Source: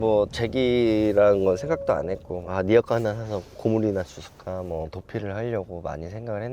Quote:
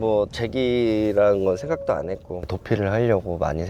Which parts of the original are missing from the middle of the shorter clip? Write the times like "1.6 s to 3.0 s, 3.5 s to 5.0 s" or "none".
2.5 s to 4.9 s